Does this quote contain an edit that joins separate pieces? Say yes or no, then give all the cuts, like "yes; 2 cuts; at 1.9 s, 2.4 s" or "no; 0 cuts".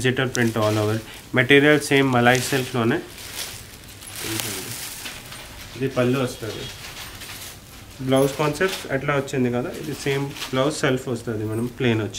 no; 0 cuts